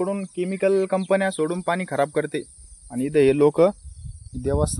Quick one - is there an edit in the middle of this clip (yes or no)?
no